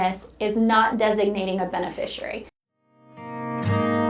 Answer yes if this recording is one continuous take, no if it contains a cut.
no